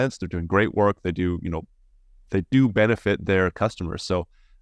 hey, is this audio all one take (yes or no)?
yes